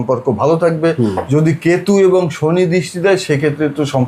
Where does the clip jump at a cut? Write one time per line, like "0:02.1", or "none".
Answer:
none